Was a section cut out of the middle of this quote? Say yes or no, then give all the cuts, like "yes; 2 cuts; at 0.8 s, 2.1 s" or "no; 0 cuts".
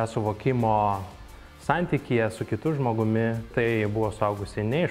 yes; 1 cut; at 3.5 s